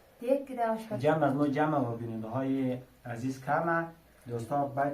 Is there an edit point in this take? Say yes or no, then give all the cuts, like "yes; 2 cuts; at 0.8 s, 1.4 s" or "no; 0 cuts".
yes; 1 cut; at 0.9 s